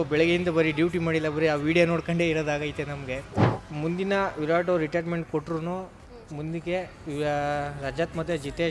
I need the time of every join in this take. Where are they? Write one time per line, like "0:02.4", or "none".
0:03.5